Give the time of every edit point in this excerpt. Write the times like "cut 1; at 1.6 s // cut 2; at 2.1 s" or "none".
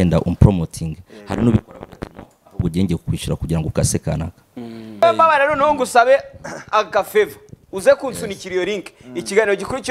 cut 1; at 5.0 s